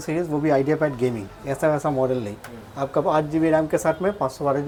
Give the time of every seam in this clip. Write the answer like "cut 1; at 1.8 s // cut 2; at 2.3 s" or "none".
none

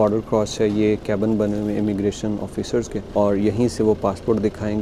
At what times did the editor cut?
cut 1; at 3.0 s

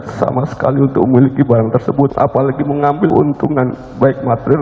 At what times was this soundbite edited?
cut 1; at 2.1 s // cut 2; at 3.1 s

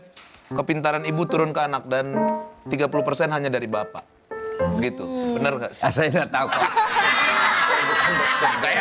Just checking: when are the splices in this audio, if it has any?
none

